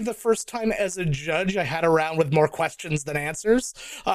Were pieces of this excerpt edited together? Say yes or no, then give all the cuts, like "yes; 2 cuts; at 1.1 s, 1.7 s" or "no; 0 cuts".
no; 0 cuts